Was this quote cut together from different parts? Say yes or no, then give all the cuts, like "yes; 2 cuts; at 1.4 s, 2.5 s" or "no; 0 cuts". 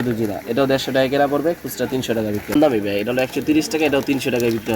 yes; 1 cut; at 2.5 s